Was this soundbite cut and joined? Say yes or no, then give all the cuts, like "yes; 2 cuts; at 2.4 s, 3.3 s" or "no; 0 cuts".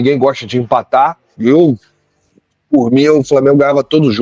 no; 0 cuts